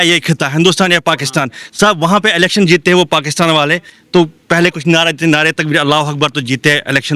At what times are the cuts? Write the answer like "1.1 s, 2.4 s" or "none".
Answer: none

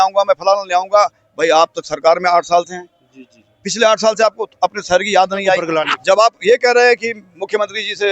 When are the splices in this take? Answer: 5.7 s

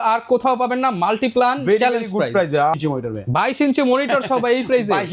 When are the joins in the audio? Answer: 2.8 s

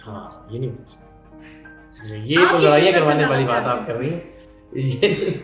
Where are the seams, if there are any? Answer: none

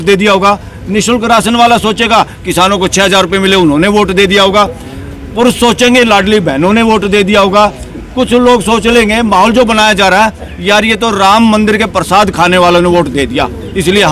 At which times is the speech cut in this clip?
none

